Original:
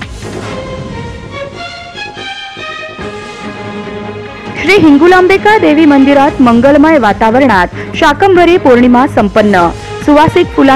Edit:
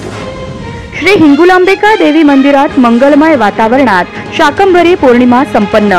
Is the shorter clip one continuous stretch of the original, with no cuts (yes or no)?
no